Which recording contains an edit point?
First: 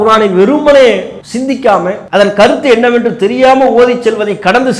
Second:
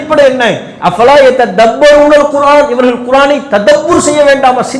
first; 2 cuts; at 1.2 s, 2.0 s

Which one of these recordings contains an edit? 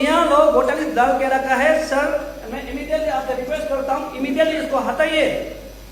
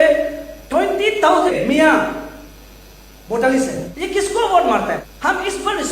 second; 3 cuts; at 1.5 s, 3.9 s, 5.1 s

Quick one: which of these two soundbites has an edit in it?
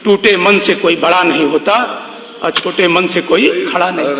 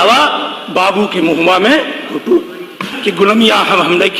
second; 1 cut; at 2.9 s

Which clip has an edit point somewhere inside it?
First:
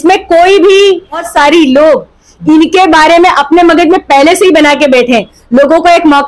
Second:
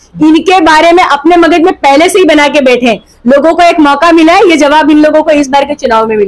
first; 1 cut; at 1.3 s

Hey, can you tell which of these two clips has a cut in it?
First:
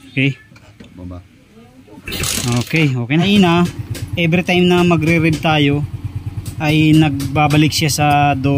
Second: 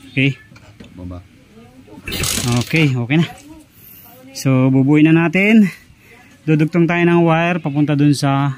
first; 1 cut; at 3.3 s

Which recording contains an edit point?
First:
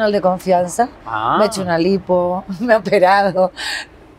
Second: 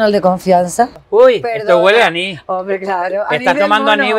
second; 1 cut; at 1.0 s

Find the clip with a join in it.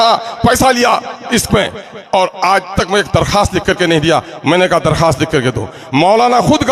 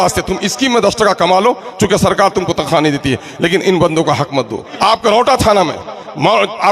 second; 1 cut; at 4.6 s

